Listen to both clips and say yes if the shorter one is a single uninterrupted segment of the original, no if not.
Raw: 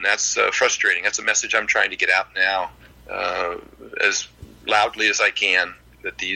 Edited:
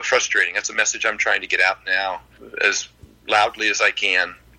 no